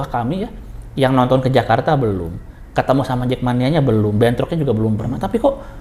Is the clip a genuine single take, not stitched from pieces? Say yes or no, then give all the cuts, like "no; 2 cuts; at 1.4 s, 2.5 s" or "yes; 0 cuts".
yes; 0 cuts